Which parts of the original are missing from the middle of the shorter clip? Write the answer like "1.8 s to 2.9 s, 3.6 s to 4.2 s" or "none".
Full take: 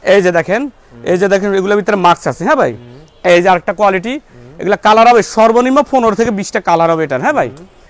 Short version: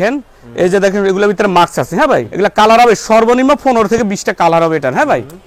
2.8 s to 4.6 s